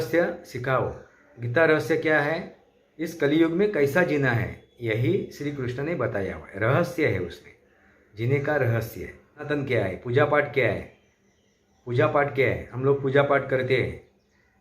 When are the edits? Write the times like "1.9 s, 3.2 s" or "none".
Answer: 9.4 s